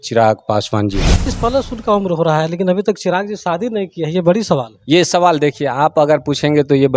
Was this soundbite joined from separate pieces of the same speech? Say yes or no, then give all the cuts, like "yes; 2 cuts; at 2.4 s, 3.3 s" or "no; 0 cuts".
yes; 1 cut; at 1.3 s